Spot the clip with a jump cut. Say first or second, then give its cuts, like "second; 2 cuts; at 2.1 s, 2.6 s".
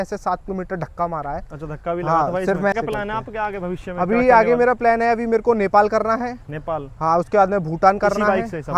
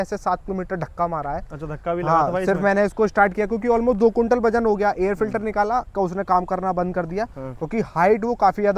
first; 1 cut; at 2.7 s